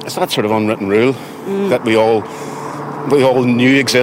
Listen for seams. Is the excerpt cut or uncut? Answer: uncut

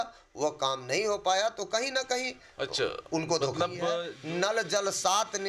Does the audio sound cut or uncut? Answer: cut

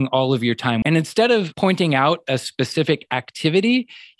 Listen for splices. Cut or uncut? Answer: cut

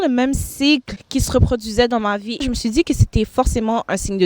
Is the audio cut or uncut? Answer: cut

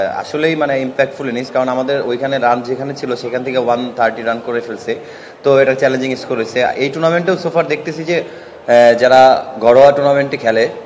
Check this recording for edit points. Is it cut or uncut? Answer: uncut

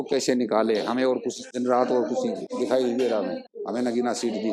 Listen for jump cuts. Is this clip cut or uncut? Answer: cut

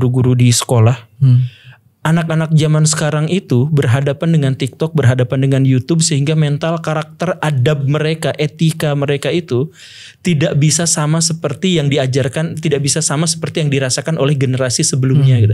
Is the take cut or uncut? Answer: uncut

